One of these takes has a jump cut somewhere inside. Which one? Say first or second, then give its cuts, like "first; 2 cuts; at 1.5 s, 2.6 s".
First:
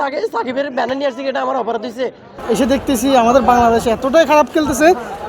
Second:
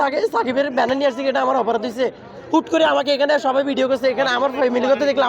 first; 1 cut; at 2.4 s